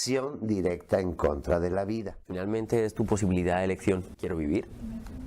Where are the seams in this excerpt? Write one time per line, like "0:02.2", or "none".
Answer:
0:02.4
0:04.3